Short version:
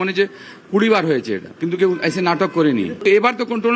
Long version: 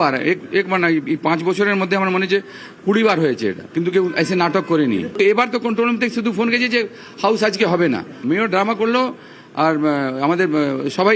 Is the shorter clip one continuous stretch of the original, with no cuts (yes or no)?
yes